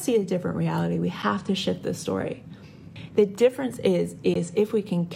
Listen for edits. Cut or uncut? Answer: cut